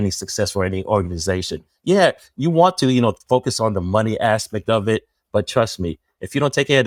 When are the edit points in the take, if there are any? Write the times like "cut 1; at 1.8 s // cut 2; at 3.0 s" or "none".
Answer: none